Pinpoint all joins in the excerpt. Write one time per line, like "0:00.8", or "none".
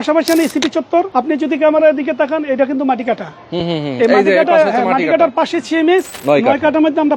0:01.1
0:06.1